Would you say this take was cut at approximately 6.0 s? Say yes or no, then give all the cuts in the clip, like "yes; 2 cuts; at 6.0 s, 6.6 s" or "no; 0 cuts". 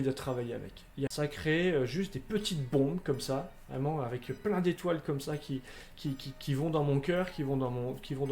no; 1 cut; at 1.1 s